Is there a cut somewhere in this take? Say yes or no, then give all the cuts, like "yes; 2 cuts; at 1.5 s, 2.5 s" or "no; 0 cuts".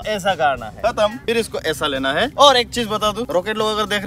no; 0 cuts